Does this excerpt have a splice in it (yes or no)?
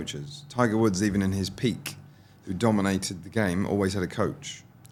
no